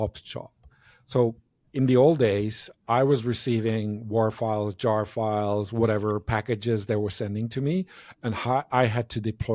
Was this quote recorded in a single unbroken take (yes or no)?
yes